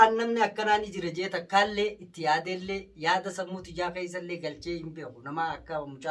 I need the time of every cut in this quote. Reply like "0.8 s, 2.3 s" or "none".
none